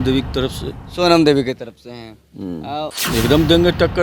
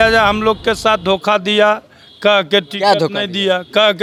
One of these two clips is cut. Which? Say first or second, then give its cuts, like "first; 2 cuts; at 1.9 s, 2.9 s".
first; 1 cut; at 3.0 s